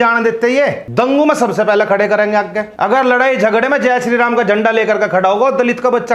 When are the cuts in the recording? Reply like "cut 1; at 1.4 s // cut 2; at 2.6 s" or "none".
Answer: cut 1; at 0.8 s // cut 2; at 2.6 s